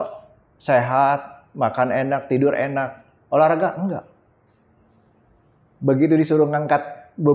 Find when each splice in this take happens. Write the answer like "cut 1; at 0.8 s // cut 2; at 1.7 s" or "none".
none